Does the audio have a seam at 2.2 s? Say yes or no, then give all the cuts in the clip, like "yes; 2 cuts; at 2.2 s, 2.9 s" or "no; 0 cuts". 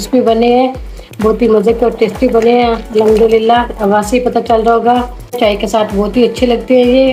no; 1 cut; at 5.4 s